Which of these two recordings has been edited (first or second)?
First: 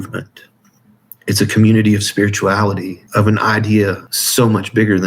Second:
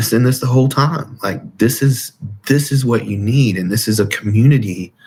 first